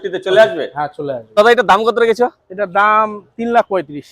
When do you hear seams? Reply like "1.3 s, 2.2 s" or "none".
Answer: 1.3 s